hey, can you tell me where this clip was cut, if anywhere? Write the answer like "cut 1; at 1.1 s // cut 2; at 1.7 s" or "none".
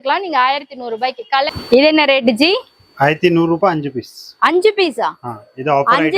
cut 1; at 1.5 s